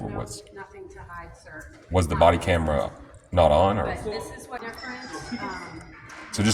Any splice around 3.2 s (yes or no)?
no